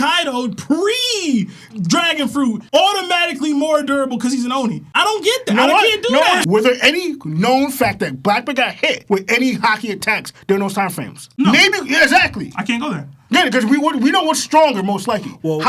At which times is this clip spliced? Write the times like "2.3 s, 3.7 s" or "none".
none